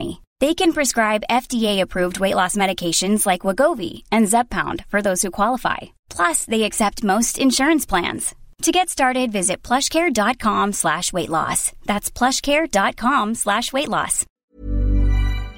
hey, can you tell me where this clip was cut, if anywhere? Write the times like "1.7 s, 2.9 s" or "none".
14.3 s